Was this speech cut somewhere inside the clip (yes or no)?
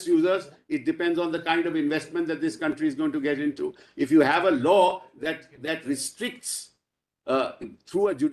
no